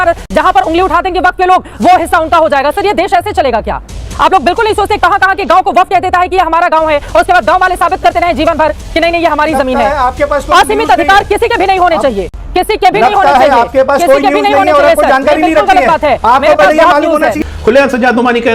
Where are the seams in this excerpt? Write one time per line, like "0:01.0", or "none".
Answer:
0:17.4